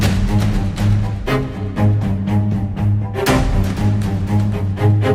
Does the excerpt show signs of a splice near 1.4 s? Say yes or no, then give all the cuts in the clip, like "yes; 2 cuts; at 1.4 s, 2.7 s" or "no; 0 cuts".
no; 0 cuts